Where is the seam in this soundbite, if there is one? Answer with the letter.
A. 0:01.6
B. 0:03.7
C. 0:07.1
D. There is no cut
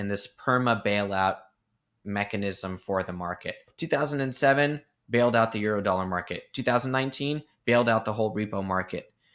B